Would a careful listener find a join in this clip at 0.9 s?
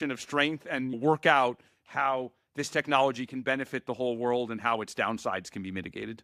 yes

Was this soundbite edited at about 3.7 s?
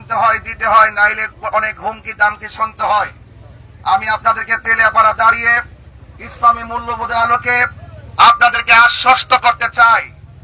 no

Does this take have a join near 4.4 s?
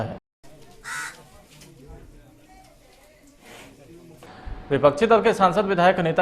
yes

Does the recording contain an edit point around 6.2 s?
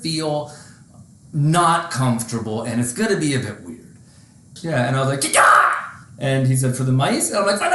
no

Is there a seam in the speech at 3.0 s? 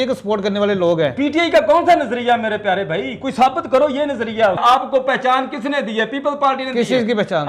no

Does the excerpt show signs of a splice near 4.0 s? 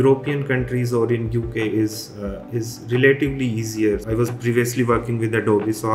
yes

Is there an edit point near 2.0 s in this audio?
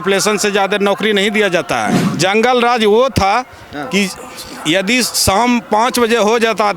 yes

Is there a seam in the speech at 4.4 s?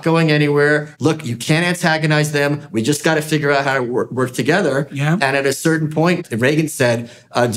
no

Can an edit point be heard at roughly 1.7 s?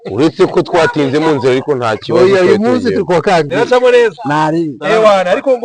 no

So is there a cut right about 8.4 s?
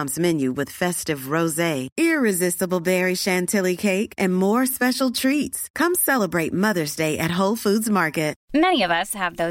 yes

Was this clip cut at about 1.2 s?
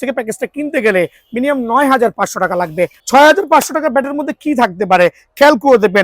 no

